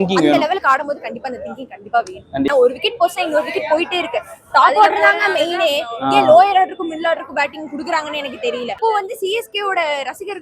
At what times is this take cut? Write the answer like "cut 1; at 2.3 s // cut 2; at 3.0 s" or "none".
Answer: cut 1; at 2.5 s // cut 2; at 8.8 s